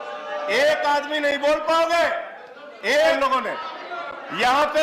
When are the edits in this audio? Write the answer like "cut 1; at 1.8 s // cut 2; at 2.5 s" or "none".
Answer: cut 1; at 3.1 s